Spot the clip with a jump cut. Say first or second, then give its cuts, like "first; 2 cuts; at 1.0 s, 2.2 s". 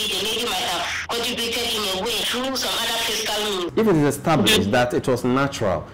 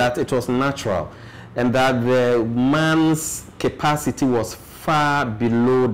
first; 3 cuts; at 1.0 s, 2.3 s, 3.7 s